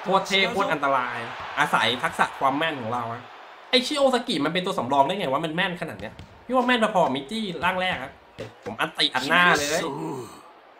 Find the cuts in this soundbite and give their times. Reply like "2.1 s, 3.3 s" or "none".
8.6 s